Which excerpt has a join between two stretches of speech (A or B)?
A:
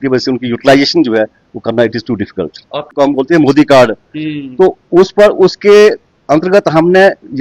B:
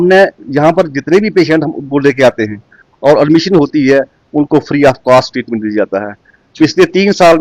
A